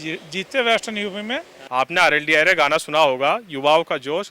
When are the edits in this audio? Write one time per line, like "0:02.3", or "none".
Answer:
0:01.6